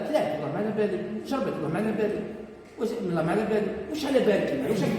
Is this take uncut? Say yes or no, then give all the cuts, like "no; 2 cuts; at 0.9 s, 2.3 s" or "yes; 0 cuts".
yes; 0 cuts